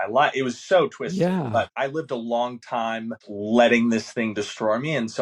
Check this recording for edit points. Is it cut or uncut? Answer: cut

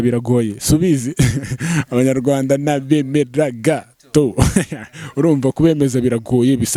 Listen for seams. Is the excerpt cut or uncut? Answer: uncut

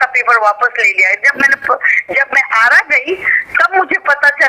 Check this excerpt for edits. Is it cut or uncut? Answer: uncut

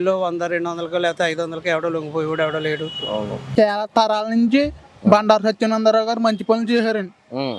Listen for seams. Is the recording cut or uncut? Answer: cut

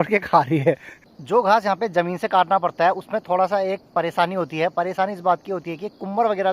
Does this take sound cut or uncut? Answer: cut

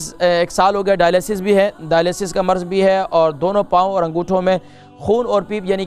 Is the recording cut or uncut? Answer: uncut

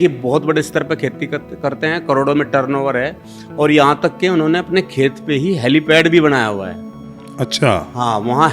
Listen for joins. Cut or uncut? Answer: uncut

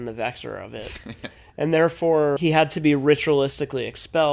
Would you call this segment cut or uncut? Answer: cut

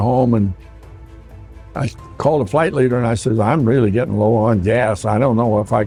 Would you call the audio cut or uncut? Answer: uncut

